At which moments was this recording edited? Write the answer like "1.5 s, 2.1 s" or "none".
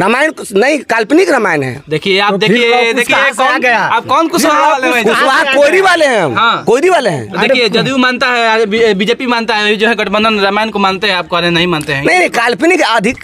none